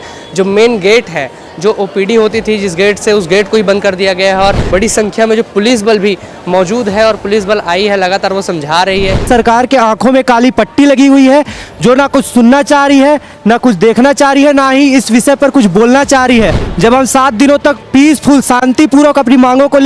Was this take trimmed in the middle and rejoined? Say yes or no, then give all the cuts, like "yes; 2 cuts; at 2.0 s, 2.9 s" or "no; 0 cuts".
yes; 3 cuts; at 4.7 s, 9.2 s, 16.6 s